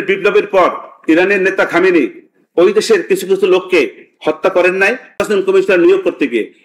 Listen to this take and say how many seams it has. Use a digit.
1